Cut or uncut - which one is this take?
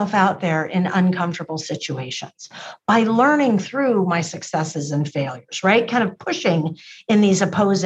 uncut